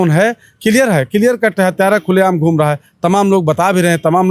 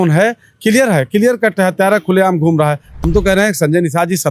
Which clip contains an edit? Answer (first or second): second